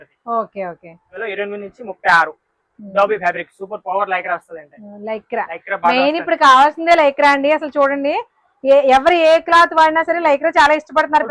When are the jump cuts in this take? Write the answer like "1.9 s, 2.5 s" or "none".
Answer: 1.2 s